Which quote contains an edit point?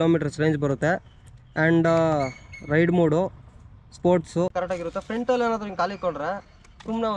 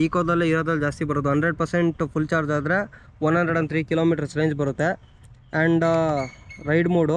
first; 1 cut; at 4.5 s

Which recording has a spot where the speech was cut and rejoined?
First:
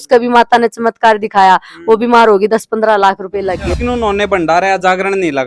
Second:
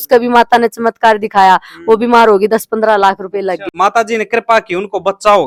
first; 1 cut; at 3.8 s

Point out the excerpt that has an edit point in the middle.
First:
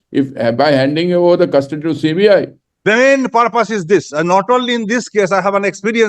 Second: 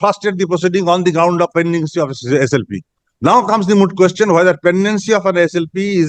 first; 1 cut; at 2.6 s

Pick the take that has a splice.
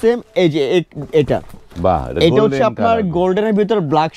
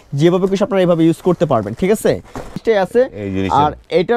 second; 1 cut; at 2.6 s

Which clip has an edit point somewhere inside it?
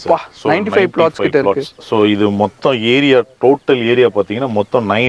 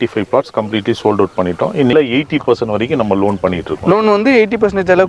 second; 1 cut; at 1.9 s

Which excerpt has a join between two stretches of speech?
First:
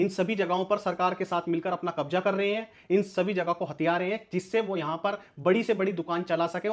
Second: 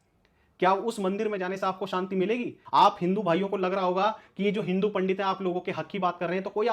second; 1 cut; at 2.6 s

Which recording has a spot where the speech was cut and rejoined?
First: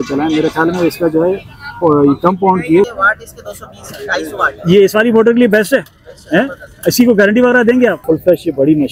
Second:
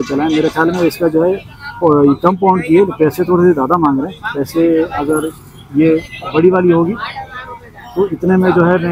first; 2 cuts; at 2.9 s, 8.0 s

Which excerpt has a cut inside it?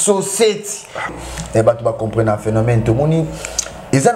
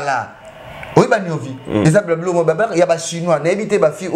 first; 1 cut; at 1.1 s

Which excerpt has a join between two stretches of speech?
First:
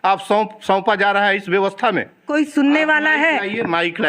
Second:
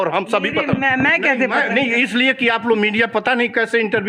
first; 1 cut; at 2.3 s

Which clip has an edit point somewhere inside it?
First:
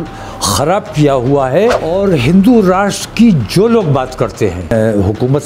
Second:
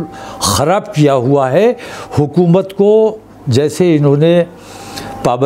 first; 2 cuts; at 1.8 s, 4.7 s

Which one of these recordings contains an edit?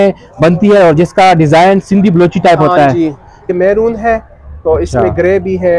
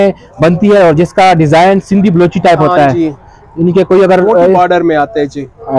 first; 1 cut; at 3.5 s

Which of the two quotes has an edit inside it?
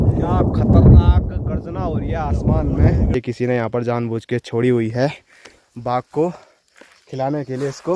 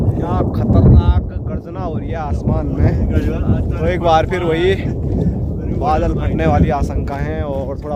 first; 1 cut; at 3.1 s

